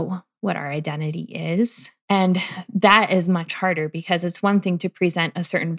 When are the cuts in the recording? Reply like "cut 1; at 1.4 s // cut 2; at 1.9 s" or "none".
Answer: cut 1; at 2.1 s